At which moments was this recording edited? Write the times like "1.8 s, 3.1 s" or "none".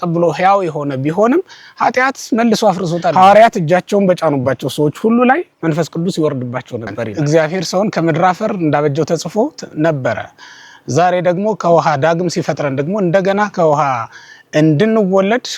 3.1 s, 7.0 s